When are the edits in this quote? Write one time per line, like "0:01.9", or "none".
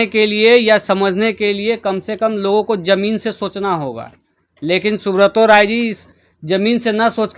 none